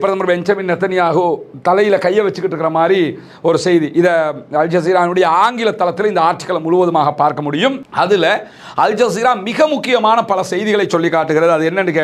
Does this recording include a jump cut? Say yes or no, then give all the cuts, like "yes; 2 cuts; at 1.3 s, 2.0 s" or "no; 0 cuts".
no; 0 cuts